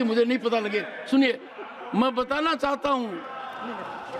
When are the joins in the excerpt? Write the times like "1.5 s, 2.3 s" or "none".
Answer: none